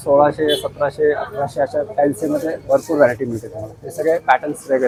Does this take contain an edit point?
no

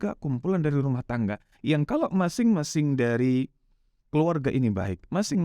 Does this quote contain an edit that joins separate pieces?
no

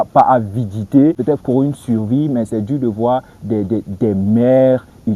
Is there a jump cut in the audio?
no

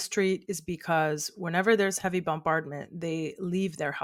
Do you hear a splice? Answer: no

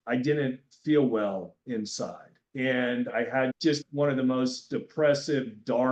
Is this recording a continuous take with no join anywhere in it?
yes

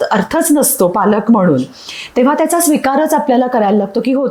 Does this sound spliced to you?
no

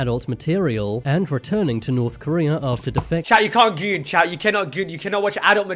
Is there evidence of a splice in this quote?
no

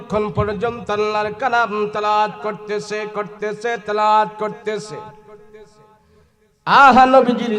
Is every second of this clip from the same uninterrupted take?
yes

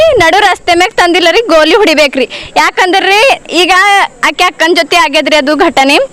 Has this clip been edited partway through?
no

